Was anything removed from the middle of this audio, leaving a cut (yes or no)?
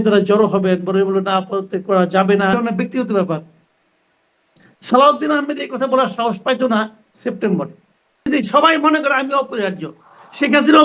yes